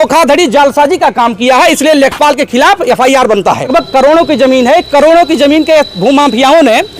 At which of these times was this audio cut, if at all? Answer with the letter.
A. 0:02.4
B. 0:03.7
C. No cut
B